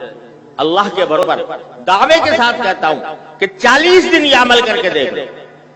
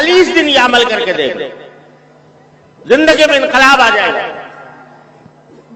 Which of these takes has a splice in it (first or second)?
first